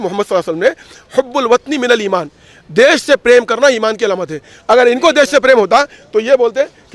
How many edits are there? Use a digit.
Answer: 0